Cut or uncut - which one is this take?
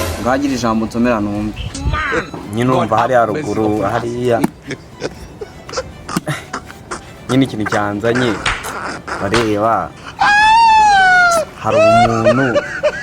cut